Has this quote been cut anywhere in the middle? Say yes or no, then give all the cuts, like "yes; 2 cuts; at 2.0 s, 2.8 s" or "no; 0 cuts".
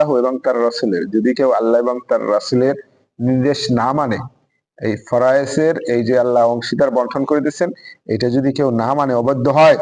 no; 0 cuts